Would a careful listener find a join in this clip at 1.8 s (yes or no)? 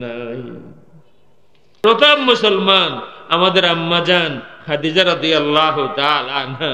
yes